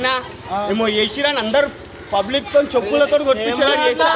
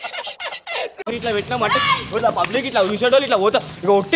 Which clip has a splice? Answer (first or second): second